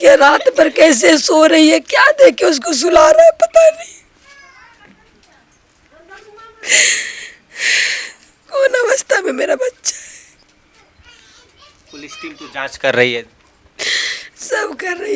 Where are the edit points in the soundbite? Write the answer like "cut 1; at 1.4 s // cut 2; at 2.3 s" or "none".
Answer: none